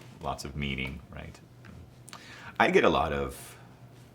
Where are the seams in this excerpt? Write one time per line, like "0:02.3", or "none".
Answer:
0:01.9